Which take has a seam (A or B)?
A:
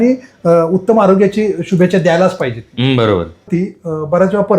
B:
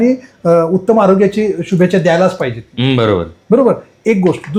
A